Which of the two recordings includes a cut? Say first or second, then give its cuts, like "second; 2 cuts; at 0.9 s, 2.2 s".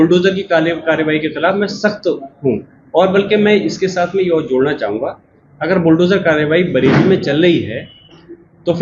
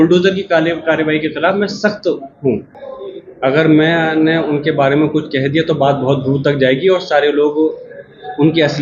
second; 1 cut; at 2.7 s